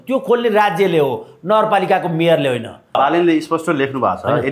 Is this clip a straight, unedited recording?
no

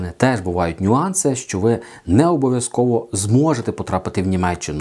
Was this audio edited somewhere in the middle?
no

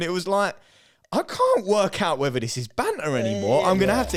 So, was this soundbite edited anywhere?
no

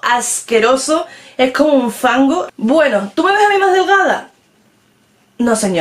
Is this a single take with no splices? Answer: no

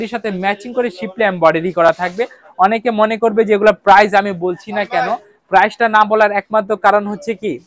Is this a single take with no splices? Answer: yes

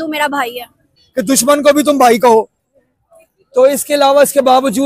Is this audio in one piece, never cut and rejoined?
no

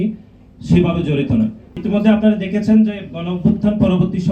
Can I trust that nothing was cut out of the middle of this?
yes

